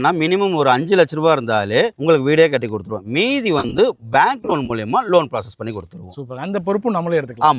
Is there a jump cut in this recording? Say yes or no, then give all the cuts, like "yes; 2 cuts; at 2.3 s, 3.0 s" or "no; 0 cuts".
no; 0 cuts